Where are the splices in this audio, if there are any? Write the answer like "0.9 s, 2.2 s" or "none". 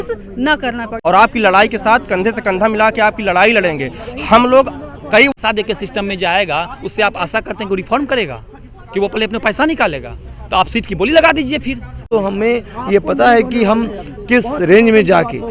0.9 s, 5.3 s, 12.0 s